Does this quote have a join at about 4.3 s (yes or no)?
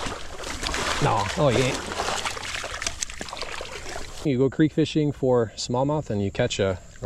yes